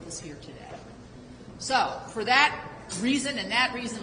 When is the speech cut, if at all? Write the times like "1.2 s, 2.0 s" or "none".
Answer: 2.1 s